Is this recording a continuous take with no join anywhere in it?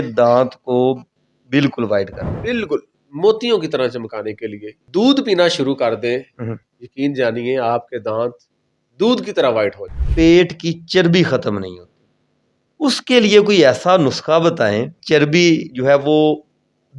no; 3 cuts; at 4.8 s, 10.3 s, 15.0 s

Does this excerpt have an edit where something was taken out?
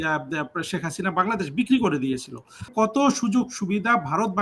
yes; 1 cut; at 2.7 s

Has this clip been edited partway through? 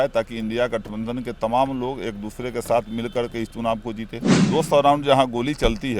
yes; 1 cut; at 4.2 s

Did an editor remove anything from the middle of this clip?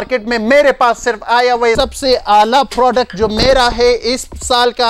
yes; 1 cut; at 1.8 s

